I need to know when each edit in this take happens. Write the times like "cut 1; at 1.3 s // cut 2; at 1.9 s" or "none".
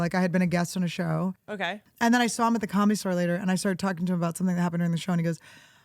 cut 1; at 1.6 s